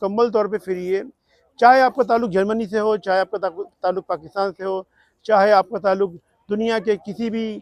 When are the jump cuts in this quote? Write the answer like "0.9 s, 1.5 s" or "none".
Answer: none